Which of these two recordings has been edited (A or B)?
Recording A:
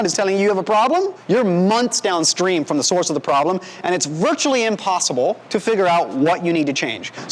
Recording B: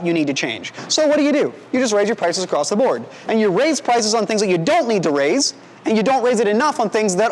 A